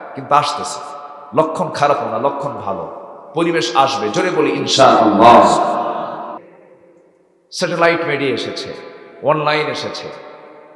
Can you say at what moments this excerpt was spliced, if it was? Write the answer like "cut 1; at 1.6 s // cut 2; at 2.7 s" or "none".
cut 1; at 6.4 s